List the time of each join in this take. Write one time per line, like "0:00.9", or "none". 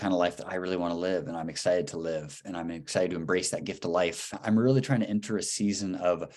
0:04.3